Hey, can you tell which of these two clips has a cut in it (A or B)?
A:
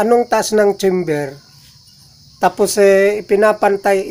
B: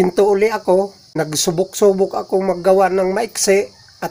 B